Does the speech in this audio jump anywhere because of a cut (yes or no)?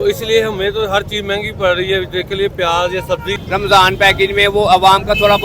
yes